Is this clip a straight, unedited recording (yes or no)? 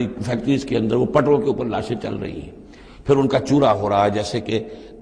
yes